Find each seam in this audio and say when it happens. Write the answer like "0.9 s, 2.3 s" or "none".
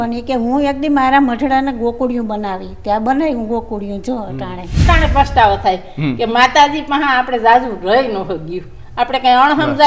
4.8 s